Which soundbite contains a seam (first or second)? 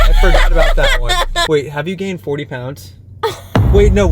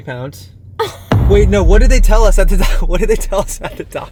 first